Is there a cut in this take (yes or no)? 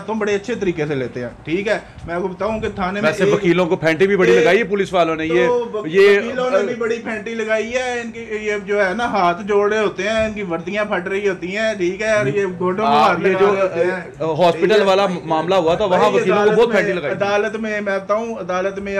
no